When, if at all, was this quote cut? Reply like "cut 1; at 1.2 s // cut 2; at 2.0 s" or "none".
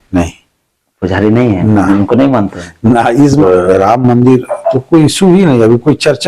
cut 1; at 3.4 s